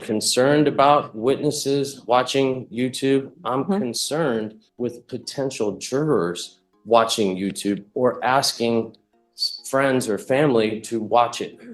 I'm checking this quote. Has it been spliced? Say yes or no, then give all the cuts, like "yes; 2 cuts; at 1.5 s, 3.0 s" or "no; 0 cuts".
yes; 1 cut; at 4.6 s